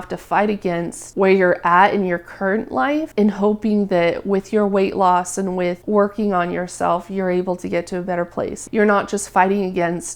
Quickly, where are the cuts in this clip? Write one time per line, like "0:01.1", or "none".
0:08.6